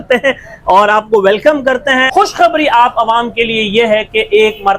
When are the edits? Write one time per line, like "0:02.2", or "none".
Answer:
0:02.1